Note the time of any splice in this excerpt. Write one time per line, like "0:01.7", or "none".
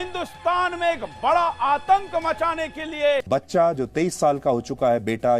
0:03.2